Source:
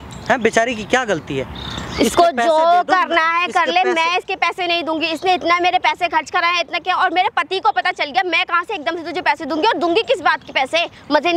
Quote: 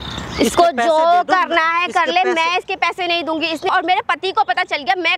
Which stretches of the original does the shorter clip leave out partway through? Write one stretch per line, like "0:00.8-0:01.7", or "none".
0:05.3-0:07.0